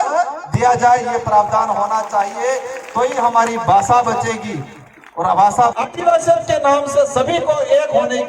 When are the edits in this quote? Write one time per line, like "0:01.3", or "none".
0:05.7